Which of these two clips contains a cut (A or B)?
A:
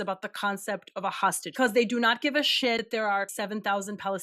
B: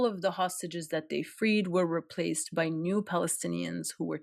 A